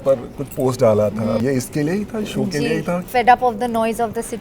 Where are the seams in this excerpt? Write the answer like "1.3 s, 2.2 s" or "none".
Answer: 1.4 s, 3.0 s